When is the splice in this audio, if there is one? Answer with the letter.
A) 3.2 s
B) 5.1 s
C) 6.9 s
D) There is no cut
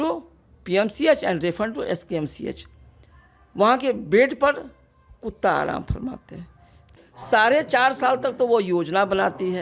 C